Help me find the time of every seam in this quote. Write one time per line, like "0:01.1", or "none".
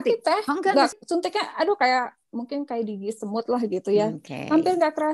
0:01.0